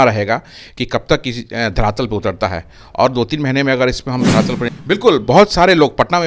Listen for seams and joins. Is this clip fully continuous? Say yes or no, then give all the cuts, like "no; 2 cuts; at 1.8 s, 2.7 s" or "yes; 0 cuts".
no; 1 cut; at 4.7 s